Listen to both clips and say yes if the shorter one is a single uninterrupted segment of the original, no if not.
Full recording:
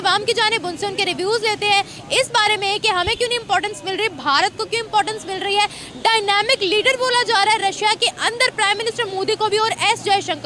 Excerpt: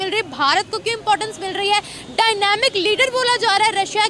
yes